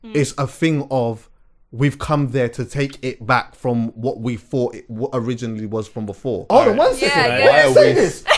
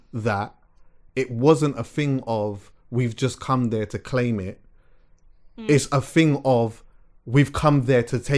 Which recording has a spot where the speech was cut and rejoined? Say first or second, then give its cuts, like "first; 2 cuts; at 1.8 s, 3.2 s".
first; 1 cut; at 6.5 s